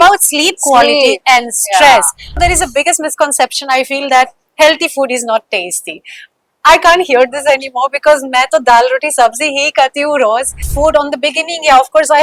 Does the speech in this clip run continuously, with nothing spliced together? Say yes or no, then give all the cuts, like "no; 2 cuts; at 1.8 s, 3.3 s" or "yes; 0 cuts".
no; 2 cuts; at 2.4 s, 10.7 s